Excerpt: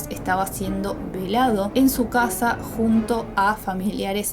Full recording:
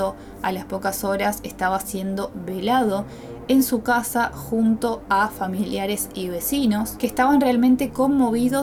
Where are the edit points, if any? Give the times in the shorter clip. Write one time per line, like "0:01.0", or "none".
0:01.7